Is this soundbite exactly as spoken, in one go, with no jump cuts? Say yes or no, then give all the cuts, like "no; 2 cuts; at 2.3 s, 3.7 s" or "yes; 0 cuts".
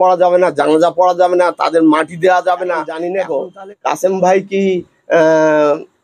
no; 1 cut; at 3.0 s